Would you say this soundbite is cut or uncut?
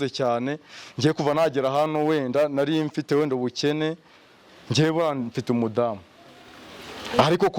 uncut